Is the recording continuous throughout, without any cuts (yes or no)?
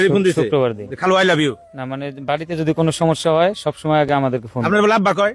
yes